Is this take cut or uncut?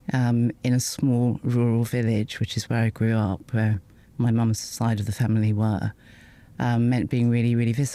uncut